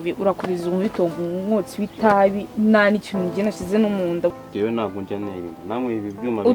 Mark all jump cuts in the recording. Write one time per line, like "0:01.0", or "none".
0:04.3